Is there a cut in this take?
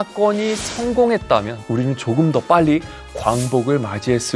no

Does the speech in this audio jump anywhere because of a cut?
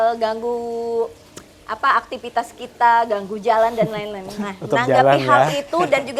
no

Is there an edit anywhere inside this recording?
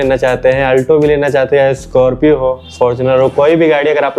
no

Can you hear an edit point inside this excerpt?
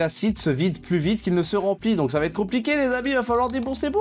no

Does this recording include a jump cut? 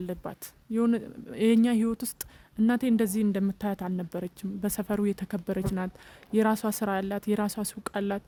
no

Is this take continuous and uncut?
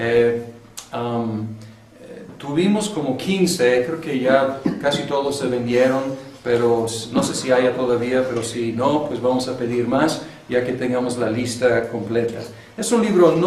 yes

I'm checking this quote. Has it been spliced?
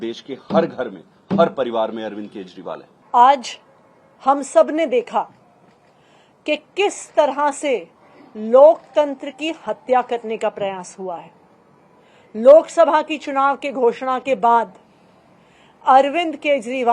no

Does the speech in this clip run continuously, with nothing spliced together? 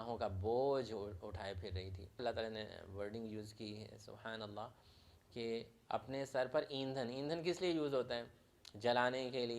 no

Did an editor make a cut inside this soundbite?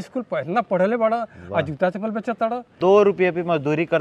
yes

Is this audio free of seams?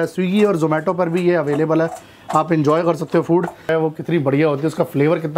no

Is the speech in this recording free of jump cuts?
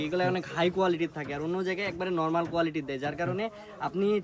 yes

